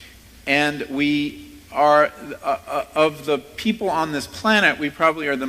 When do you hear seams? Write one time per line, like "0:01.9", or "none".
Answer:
0:02.3